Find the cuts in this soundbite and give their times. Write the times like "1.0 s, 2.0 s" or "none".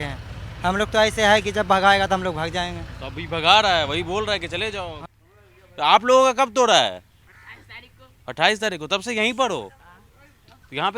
5.0 s